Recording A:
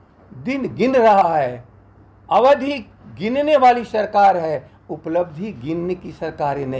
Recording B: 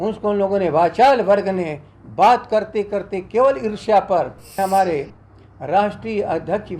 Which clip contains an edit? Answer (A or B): B